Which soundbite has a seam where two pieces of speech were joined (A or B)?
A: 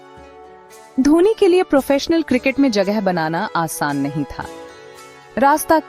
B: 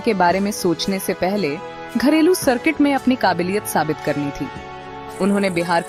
A